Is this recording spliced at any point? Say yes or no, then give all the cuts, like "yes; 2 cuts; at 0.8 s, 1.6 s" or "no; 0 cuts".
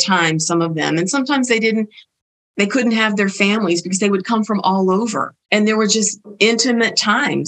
yes; 2 cuts; at 5.3 s, 6.3 s